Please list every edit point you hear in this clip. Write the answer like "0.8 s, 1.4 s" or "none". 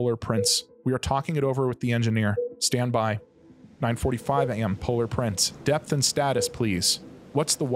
3.1 s